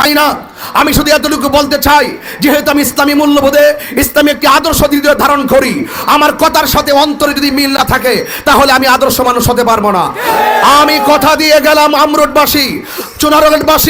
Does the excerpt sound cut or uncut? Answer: uncut